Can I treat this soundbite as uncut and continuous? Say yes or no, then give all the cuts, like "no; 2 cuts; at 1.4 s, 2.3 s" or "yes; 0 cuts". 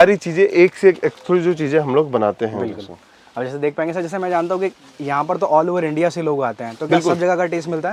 yes; 0 cuts